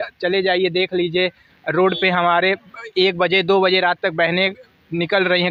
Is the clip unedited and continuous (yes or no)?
yes